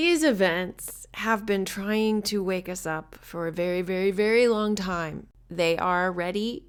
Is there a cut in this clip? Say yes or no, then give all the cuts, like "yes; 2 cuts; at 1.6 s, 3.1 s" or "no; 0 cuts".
no; 0 cuts